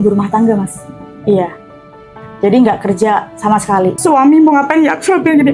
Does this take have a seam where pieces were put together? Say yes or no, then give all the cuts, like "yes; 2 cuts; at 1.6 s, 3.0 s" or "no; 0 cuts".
yes; 1 cut; at 4.0 s